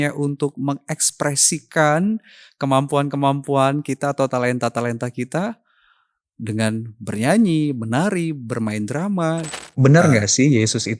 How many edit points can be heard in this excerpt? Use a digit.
1